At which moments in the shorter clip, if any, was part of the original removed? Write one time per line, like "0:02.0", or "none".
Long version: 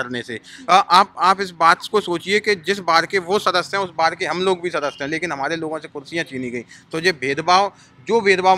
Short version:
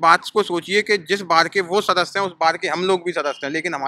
none